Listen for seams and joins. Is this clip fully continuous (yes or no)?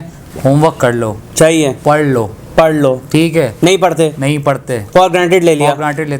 yes